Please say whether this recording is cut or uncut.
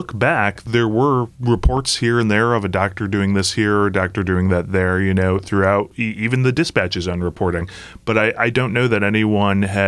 cut